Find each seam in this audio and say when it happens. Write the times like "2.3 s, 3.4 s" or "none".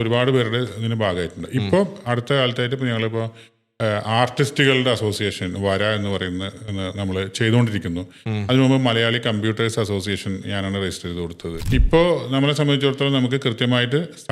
11.6 s